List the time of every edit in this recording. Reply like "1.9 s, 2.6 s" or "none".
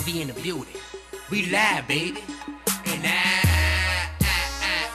none